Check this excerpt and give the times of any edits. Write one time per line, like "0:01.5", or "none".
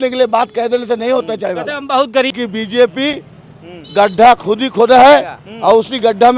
0:02.4